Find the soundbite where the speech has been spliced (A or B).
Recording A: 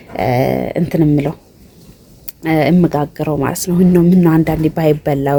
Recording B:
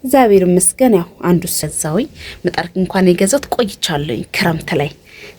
B